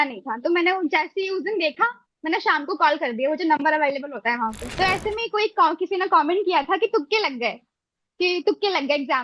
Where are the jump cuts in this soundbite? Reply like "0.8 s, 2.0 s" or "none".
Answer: 4.6 s